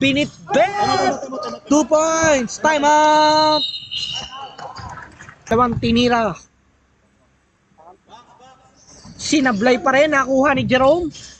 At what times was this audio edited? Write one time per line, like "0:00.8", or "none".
0:05.5